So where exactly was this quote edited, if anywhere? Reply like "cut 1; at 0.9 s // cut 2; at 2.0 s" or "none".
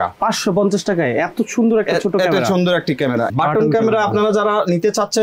cut 1; at 3.3 s